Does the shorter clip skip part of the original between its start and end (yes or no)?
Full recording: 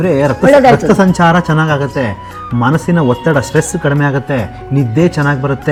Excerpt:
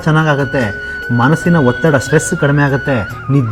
no